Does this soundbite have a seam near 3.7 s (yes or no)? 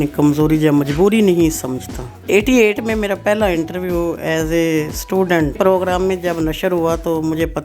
no